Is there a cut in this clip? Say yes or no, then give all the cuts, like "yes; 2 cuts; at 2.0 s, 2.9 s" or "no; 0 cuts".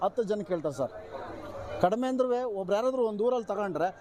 no; 0 cuts